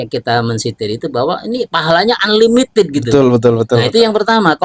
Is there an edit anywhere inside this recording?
no; 0 cuts

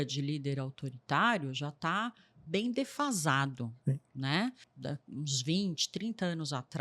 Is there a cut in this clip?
yes; 1 cut; at 4.7 s

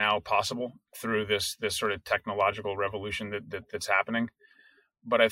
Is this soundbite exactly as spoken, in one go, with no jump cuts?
yes; 0 cuts

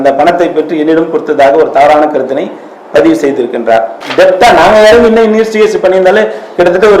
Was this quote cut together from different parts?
yes; 1 cut; at 3.9 s

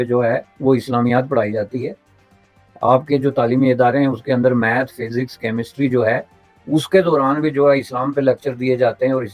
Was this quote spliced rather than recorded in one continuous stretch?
no; 0 cuts

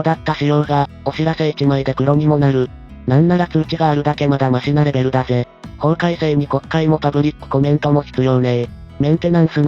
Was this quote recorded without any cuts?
yes; 0 cuts

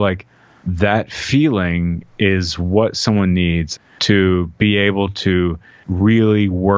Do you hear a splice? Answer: yes; 1 cut; at 3.6 s

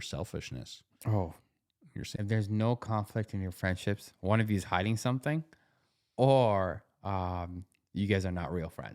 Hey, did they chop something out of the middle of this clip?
yes; 1 cut; at 2.1 s

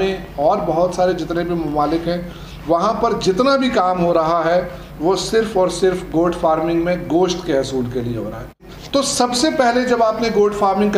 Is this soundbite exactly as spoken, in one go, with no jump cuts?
no; 1 cut; at 8.7 s

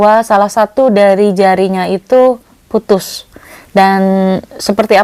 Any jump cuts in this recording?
no; 0 cuts

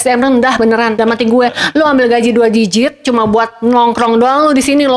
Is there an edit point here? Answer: no; 0 cuts

